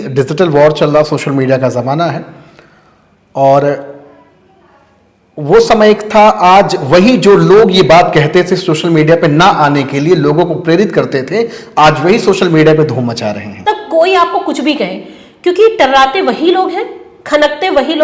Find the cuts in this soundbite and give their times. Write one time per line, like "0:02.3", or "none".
0:13.6